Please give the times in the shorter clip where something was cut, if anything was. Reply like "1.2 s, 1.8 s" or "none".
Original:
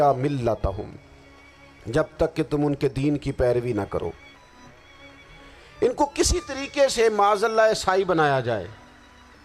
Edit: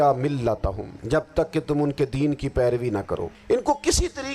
0.9 s, 3.4 s